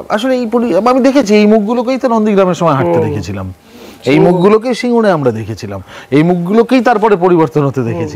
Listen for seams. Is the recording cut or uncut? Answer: uncut